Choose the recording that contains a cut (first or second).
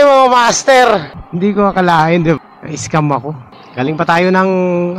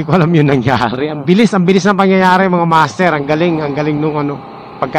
first